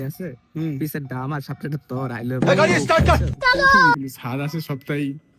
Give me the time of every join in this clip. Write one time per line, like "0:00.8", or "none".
0:02.4
0:03.9